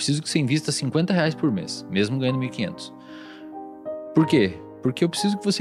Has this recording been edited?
no; 0 cuts

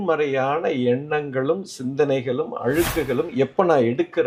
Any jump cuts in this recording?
no; 0 cuts

